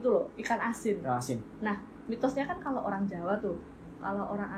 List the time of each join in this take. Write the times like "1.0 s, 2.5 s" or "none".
none